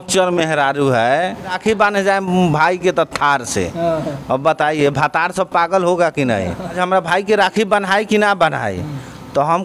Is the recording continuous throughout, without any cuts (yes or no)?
no